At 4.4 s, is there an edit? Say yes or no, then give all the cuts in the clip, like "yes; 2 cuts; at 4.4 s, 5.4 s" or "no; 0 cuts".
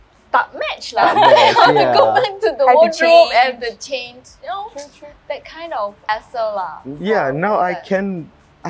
no; 1 cut; at 6.1 s